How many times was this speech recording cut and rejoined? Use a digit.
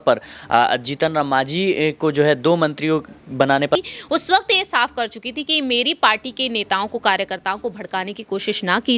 1